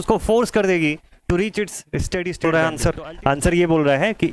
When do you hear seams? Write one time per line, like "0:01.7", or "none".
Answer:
0:02.4